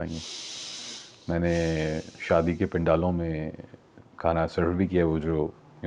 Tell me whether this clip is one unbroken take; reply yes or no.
yes